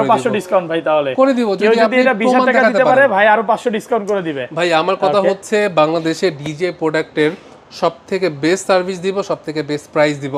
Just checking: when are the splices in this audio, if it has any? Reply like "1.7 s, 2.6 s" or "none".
none